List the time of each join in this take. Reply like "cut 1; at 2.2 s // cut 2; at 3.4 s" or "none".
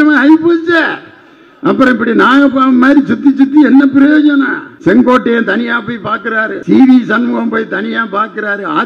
cut 1; at 4.6 s // cut 2; at 6.6 s